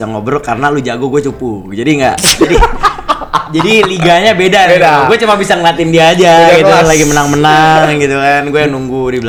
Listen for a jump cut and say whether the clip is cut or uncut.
uncut